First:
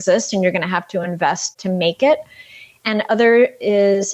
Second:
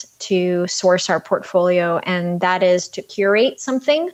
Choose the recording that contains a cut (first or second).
first